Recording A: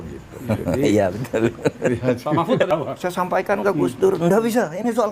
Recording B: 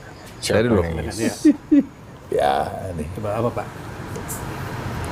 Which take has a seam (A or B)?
A